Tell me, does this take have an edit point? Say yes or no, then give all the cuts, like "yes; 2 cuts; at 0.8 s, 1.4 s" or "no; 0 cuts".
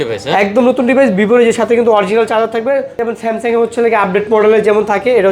yes; 1 cut; at 3.1 s